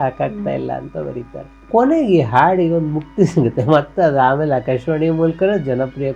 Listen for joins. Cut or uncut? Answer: uncut